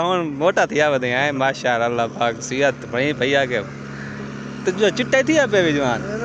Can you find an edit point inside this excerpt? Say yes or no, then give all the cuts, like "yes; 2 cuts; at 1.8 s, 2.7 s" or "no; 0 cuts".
no; 0 cuts